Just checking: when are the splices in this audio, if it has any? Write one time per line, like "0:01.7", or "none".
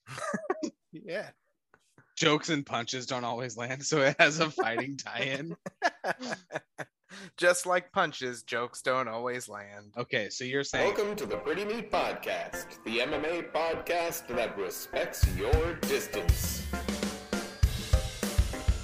0:10.7